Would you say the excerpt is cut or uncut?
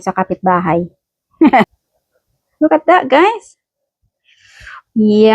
cut